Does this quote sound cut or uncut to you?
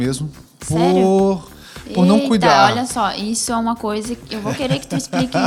uncut